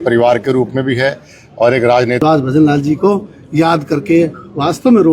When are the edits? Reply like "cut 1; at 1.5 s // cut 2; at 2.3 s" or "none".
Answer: cut 1; at 2.2 s